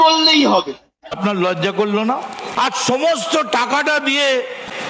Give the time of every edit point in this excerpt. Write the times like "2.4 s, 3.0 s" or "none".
1.2 s